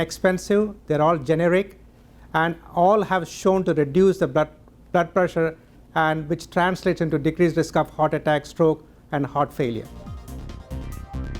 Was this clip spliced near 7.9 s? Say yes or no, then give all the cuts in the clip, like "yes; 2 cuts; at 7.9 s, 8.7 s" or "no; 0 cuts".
no; 1 cut; at 10.0 s